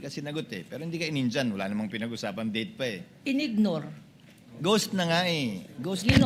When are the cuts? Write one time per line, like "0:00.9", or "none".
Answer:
none